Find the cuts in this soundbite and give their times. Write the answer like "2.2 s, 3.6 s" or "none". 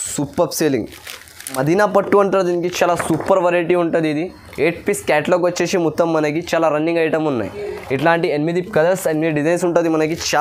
1.6 s